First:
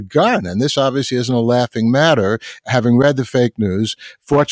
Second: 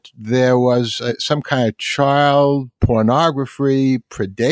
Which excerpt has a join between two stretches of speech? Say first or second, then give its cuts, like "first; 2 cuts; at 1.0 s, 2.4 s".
second; 1 cut; at 2.7 s